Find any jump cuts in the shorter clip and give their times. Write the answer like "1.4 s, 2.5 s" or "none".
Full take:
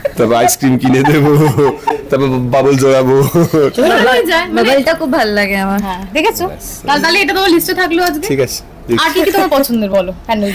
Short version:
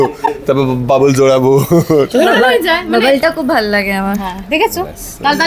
none